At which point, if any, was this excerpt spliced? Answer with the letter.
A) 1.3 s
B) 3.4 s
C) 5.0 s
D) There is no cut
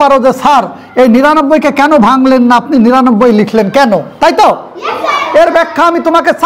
D